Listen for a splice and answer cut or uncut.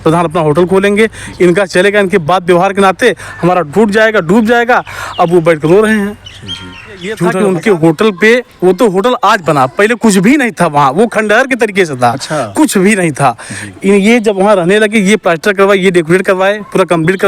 cut